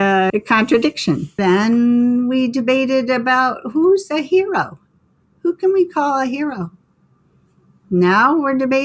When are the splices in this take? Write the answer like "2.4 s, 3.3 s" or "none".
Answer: none